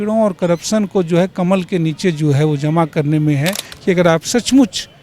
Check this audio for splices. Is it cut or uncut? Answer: cut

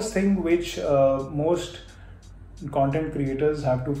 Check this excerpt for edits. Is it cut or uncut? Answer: uncut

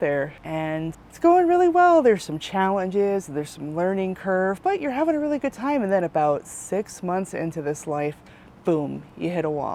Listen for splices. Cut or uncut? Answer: uncut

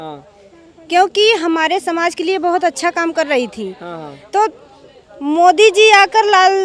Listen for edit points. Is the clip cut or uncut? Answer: uncut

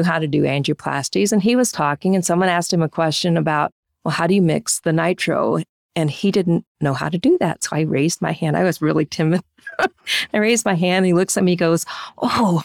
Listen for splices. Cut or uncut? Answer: uncut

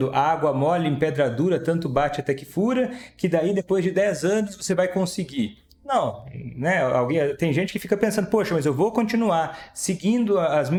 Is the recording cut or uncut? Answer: uncut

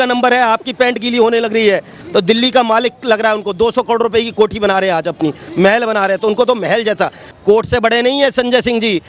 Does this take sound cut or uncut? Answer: cut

